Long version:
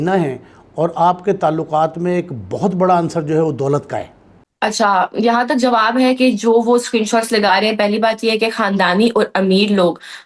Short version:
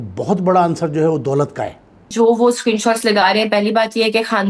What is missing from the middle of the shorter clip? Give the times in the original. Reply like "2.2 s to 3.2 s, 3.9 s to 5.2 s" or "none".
4.5 s to 6.4 s